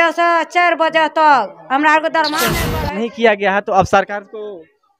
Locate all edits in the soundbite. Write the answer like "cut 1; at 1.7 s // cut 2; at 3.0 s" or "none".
cut 1; at 2.6 s

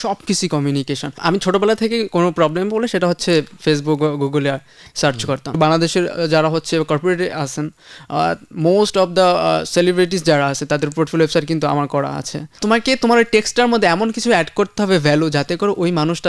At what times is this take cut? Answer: cut 1; at 1.2 s // cut 2; at 5.5 s // cut 3; at 12.6 s

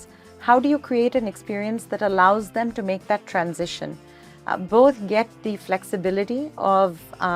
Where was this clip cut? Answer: none

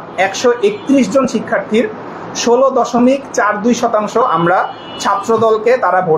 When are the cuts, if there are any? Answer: none

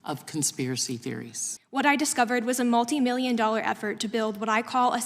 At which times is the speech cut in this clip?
cut 1; at 1.6 s

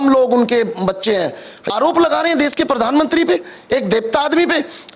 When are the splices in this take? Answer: cut 1; at 1.5 s

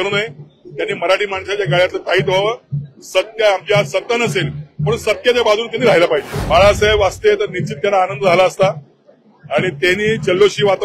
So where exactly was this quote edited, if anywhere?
cut 1; at 6.3 s

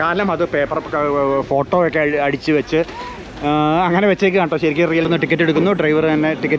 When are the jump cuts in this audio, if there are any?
cut 1; at 5.1 s

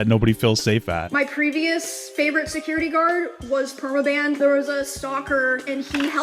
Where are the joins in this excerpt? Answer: cut 1; at 1.1 s // cut 2; at 4.4 s

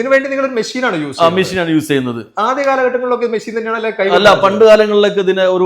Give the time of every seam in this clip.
none

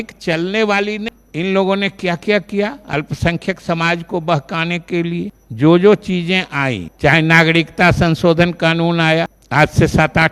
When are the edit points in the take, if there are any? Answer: cut 1; at 1.1 s // cut 2; at 5.4 s // cut 3; at 6.9 s // cut 4; at 9.4 s

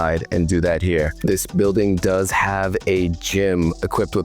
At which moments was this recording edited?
cut 1; at 1.2 s

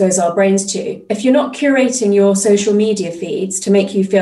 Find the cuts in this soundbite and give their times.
none

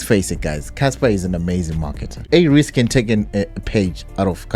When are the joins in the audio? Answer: cut 1; at 2.1 s

